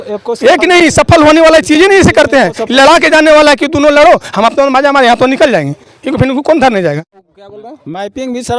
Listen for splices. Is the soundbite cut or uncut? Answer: cut